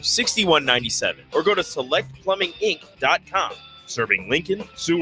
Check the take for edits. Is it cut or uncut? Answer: uncut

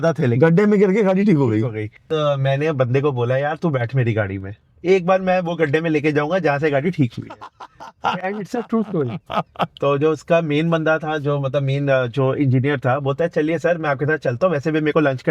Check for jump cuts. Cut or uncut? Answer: cut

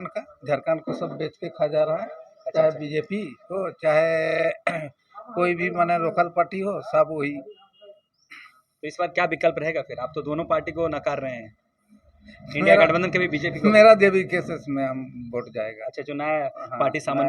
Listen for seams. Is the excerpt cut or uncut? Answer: uncut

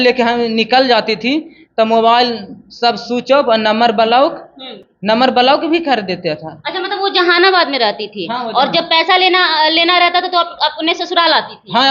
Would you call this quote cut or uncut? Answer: uncut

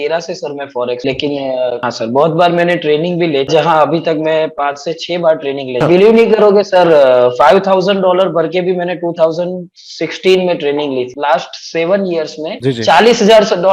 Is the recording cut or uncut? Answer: cut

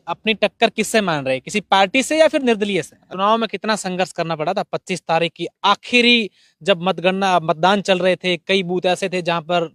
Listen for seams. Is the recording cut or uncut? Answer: cut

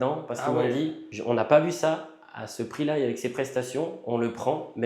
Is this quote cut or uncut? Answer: cut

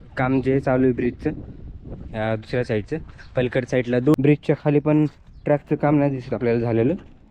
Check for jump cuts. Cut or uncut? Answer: cut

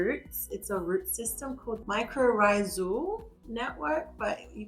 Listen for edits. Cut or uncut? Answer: cut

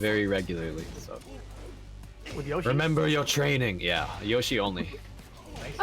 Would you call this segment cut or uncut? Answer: cut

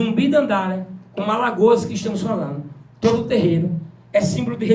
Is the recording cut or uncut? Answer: uncut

